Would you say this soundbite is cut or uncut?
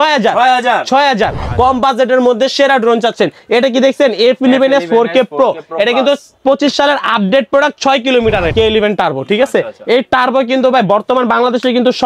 cut